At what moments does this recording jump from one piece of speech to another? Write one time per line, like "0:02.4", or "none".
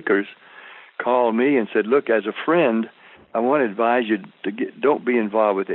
none